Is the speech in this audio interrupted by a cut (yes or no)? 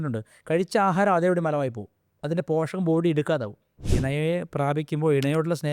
yes